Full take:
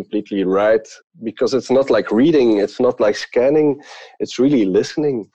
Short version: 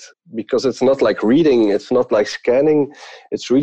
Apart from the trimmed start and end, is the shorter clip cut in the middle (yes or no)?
no